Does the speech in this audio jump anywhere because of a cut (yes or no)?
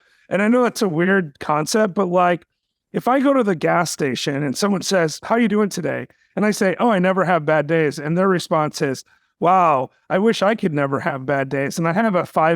yes